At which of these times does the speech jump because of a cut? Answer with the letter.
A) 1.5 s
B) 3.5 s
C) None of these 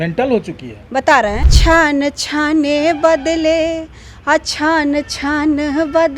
A